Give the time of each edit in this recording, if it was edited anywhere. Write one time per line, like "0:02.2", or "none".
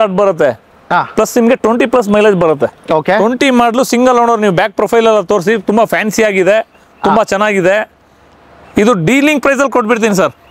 none